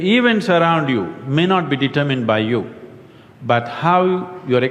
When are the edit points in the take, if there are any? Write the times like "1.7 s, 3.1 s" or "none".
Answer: none